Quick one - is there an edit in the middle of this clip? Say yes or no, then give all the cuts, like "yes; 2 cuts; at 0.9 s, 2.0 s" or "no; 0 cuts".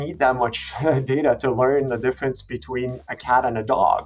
no; 0 cuts